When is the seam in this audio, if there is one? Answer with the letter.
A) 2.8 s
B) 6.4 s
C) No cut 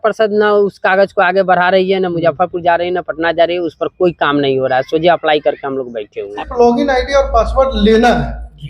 B